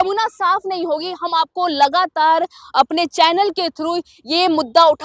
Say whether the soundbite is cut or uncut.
uncut